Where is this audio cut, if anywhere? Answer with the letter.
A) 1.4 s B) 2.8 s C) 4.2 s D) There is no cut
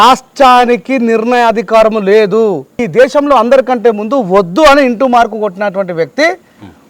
B